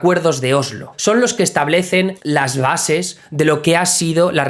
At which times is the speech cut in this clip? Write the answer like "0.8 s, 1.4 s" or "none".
0.9 s, 2.2 s